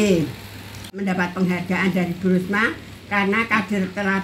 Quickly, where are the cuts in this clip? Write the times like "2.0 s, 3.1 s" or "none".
1.0 s